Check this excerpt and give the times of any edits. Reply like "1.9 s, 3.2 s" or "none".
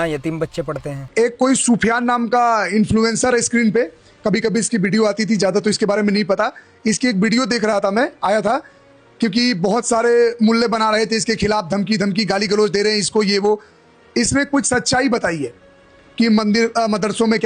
0.9 s